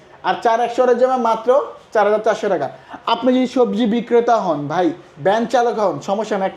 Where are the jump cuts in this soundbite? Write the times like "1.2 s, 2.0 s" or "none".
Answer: none